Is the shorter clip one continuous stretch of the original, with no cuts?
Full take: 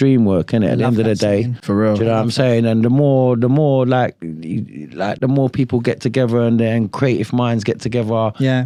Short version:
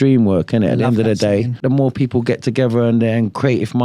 no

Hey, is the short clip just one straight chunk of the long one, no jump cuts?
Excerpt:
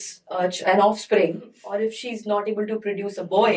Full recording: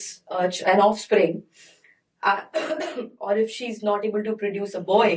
no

